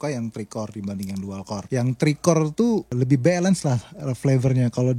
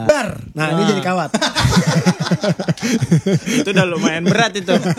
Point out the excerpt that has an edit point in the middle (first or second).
first